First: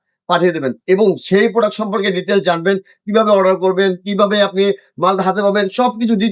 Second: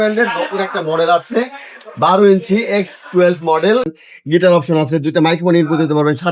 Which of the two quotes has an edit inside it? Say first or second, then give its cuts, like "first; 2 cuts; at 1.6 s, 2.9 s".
second; 1 cut; at 4.0 s